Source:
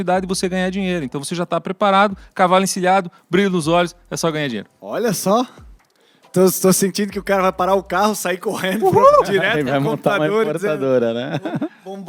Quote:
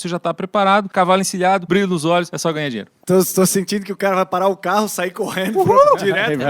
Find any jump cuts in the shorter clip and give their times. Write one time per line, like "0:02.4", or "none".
0:00.9
0:01.6
0:02.4